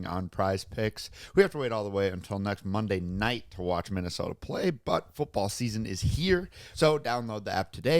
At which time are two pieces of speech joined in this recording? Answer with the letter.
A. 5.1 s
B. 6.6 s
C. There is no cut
B